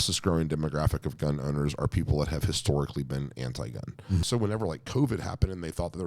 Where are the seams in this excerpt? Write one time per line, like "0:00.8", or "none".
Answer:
0:04.2